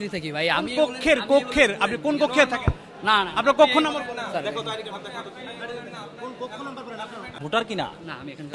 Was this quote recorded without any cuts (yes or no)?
no